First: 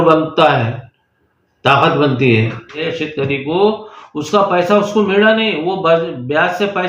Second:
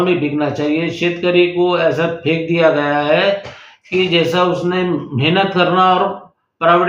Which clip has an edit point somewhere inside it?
first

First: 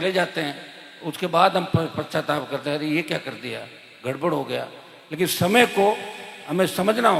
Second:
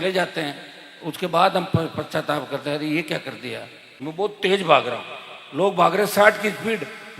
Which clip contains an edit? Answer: second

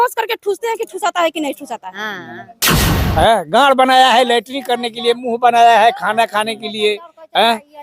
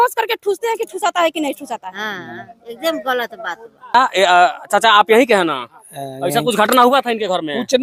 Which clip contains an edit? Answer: first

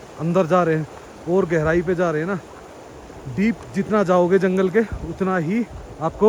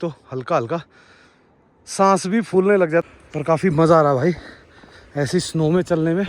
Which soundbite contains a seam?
second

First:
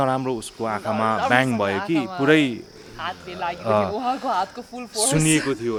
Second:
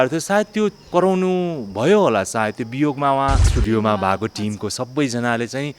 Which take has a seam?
second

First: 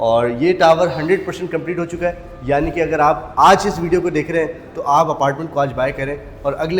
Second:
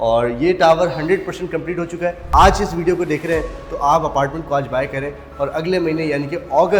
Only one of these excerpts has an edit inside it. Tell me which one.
second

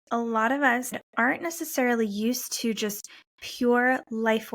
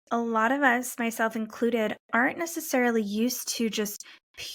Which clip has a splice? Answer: first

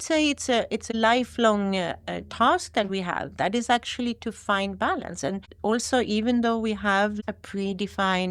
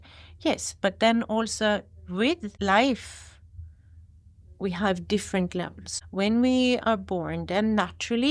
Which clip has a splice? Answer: first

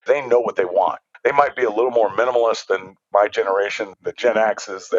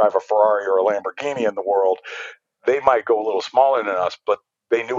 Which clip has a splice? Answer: first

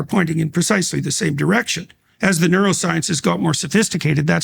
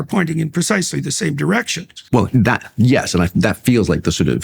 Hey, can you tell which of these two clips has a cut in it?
second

